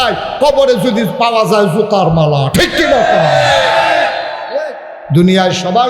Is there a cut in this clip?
no; 0 cuts

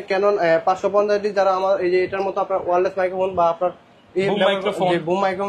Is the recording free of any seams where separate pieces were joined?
yes; 0 cuts

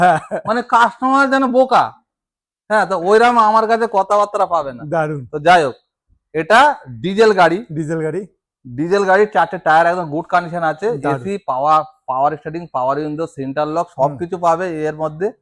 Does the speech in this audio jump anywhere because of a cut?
no; 0 cuts

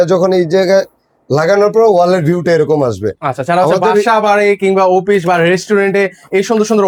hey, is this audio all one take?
yes; 0 cuts

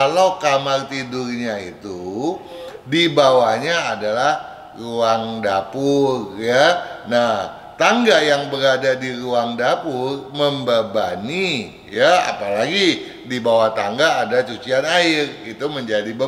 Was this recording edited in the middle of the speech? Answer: no; 0 cuts

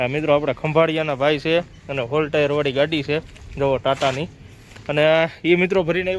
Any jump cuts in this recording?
no; 0 cuts

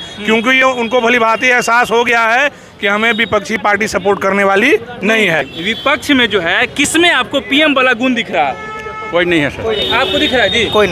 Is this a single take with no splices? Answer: no; 1 cut; at 5.5 s

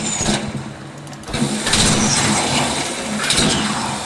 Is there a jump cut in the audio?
no; 0 cuts

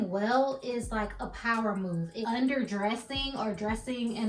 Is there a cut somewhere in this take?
yes; 1 cut; at 2.1 s

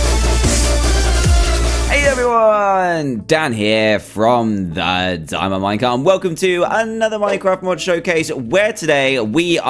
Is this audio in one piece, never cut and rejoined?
no; 1 cut; at 1.6 s

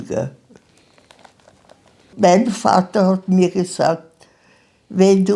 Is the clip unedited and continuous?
no; 1 cut; at 2.1 s

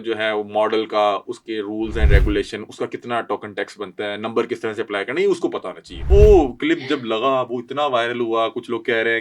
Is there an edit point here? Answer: yes; 1 cut; at 6.0 s

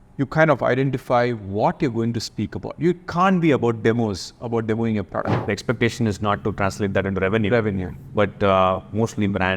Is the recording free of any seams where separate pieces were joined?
no; 1 cut; at 5.4 s

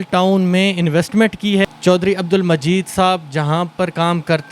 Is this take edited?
yes; 1 cut; at 1.7 s

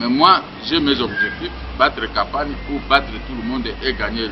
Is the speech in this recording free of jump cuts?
yes; 0 cuts

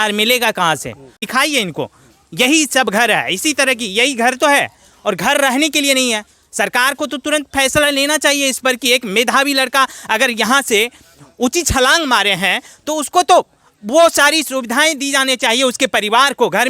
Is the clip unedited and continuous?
no; 1 cut; at 1.2 s

